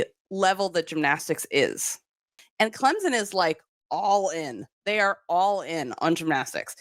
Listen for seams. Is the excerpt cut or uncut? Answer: cut